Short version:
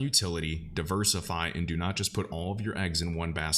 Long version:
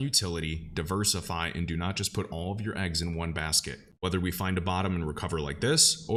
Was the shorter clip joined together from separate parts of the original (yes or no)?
no